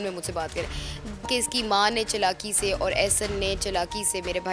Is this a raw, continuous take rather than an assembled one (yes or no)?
no